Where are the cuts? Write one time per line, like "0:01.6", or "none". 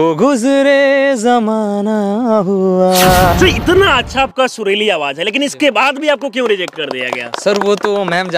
0:03.3